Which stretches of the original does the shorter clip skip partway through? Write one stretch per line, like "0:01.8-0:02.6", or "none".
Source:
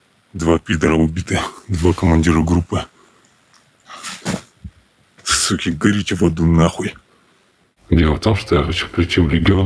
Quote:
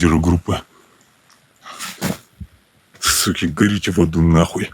none